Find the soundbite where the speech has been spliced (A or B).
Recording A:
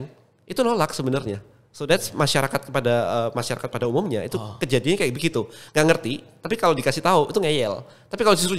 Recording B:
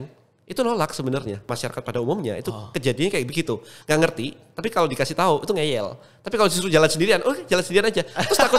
B